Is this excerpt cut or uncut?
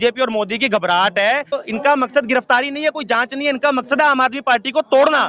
cut